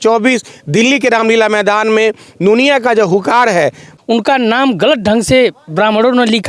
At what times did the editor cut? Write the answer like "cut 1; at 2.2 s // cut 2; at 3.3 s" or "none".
cut 1; at 3.9 s